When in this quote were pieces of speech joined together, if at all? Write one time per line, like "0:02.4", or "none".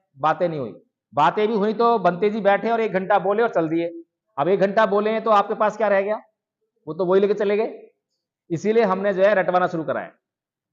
none